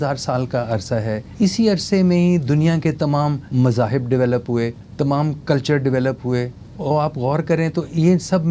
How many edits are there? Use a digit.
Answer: 4